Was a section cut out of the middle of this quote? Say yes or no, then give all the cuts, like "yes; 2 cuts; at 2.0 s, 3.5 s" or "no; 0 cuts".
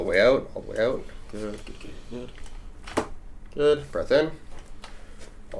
no; 0 cuts